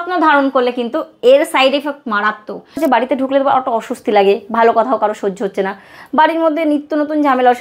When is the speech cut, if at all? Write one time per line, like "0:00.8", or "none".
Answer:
0:02.8